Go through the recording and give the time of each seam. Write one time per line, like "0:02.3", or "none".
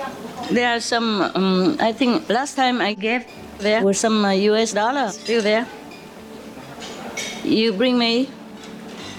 none